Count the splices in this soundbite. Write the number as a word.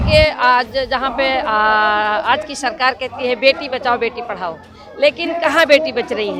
zero